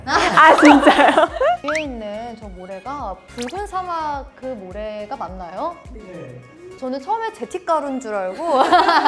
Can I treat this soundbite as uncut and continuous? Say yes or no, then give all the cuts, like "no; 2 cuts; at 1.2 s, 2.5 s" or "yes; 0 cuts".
no; 2 cuts; at 1.3 s, 6.7 s